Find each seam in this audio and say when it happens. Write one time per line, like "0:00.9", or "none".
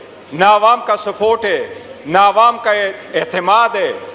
none